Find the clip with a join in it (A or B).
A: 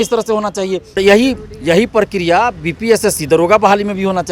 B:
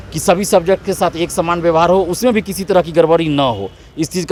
A